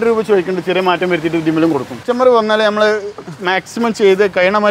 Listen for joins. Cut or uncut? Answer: cut